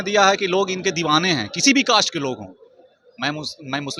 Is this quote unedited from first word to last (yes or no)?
yes